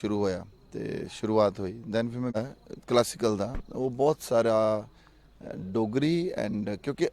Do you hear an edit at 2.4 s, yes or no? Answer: yes